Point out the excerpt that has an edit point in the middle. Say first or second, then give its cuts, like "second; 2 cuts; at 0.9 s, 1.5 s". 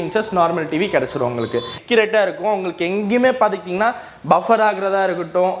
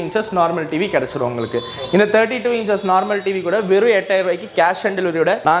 first; 1 cut; at 1.8 s